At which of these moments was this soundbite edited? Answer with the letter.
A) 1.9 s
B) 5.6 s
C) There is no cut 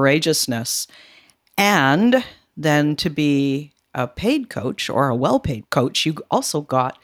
B